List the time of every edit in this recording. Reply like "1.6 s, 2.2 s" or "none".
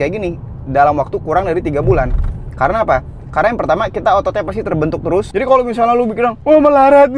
5.3 s